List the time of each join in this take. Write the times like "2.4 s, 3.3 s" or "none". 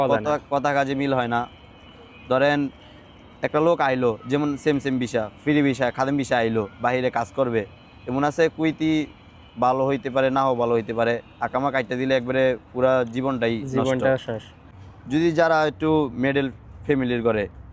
14.8 s